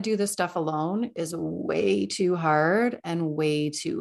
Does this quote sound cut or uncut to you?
uncut